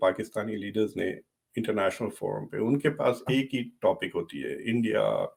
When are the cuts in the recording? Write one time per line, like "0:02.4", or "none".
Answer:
none